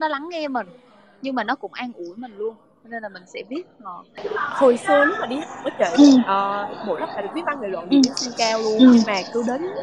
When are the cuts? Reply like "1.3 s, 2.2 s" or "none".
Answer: none